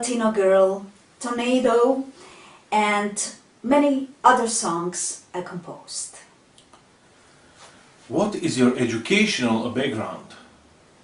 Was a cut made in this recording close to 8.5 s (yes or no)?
yes